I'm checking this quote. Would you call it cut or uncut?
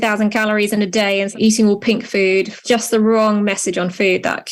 cut